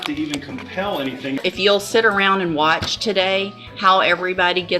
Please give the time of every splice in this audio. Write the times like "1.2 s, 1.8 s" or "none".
1.4 s

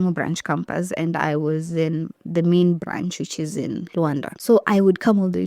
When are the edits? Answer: 4.3 s

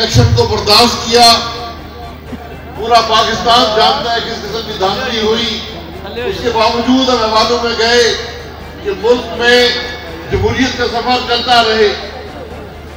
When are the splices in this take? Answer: none

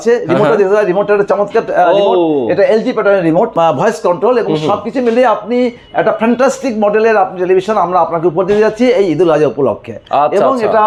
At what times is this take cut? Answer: none

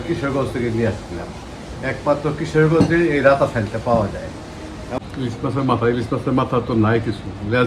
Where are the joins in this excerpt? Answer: 5.0 s

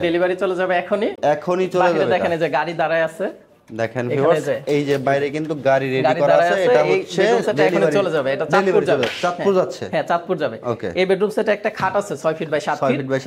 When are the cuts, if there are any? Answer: none

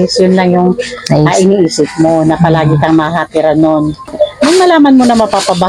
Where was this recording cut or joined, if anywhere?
4.1 s

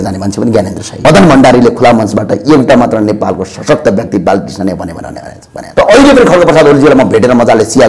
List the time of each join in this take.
1.0 s, 5.6 s

